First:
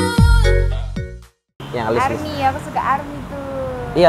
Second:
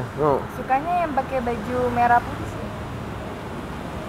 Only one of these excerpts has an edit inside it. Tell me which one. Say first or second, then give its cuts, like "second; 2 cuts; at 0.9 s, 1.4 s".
first; 1 cut; at 1.5 s